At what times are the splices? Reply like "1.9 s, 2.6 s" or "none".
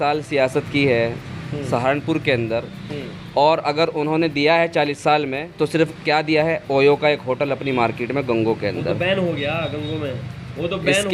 none